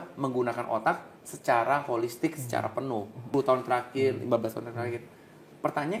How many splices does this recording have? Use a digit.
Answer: 1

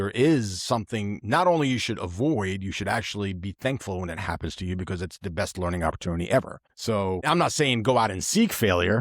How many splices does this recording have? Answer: 1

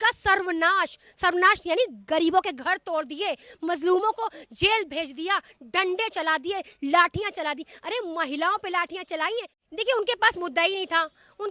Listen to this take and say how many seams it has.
1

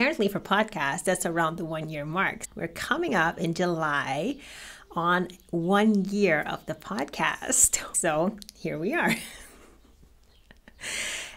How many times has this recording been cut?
2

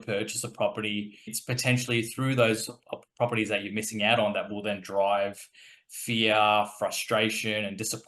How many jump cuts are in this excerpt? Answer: 1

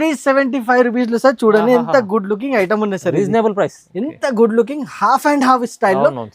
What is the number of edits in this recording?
1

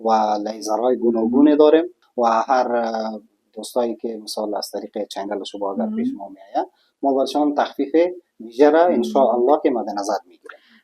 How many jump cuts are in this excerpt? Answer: 1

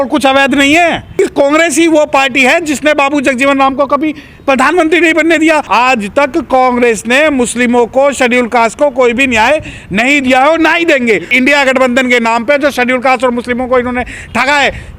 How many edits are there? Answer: 3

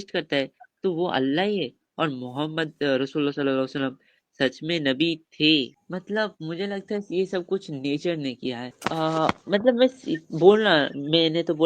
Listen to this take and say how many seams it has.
2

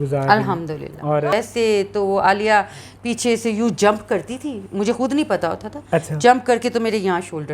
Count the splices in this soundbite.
1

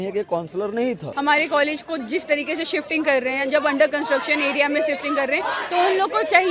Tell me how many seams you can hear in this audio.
1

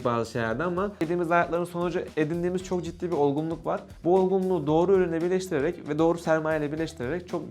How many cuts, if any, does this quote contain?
0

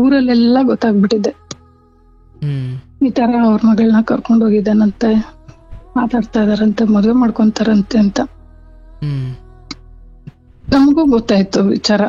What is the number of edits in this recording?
0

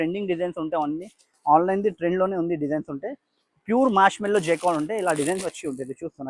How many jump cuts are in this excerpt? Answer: 0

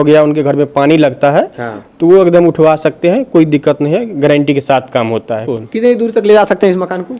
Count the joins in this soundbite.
1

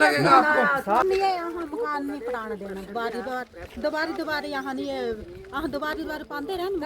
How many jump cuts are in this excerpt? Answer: 1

